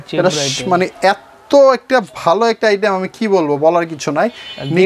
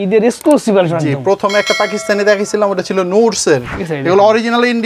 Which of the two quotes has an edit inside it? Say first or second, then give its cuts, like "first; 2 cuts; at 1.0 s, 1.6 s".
second; 1 cut; at 3.7 s